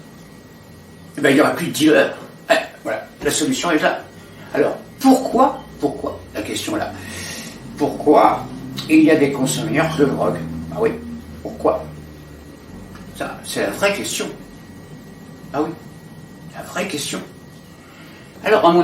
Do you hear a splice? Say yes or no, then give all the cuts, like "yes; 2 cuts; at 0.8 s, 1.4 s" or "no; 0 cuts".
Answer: no; 0 cuts